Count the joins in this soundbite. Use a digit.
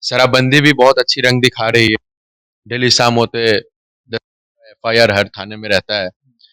0